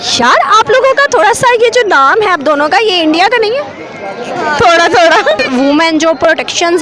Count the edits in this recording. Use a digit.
1